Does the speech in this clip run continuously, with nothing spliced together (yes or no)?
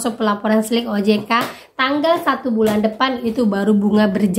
yes